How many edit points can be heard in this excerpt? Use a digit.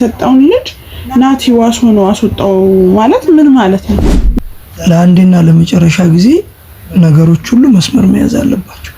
1